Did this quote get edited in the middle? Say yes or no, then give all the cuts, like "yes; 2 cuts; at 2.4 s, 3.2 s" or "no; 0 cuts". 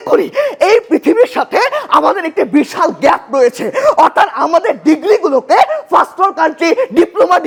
no; 0 cuts